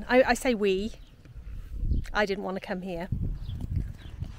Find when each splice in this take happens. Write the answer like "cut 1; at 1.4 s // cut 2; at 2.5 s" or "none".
cut 1; at 3.1 s